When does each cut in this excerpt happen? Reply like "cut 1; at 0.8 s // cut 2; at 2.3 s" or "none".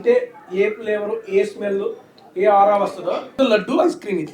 cut 1; at 3.3 s